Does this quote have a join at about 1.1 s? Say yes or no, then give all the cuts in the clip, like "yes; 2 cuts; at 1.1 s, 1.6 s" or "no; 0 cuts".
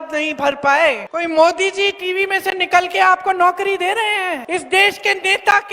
yes; 2 cuts; at 1.1 s, 4.4 s